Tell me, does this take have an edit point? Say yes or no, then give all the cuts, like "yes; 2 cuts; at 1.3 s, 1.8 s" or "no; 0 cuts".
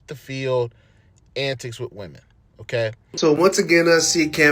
yes; 1 cut; at 3.0 s